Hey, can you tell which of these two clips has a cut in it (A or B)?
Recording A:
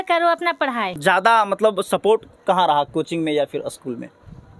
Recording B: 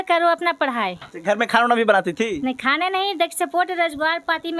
A